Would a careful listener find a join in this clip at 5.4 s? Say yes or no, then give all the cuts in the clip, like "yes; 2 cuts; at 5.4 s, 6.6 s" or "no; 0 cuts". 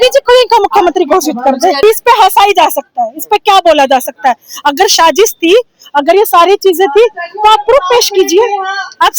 no; 1 cut; at 1.8 s